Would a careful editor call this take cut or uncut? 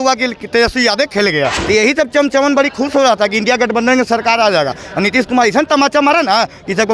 cut